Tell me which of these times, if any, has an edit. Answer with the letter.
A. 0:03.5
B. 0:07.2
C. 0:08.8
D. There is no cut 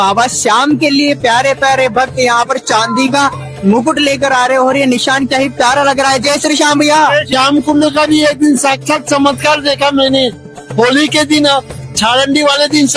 B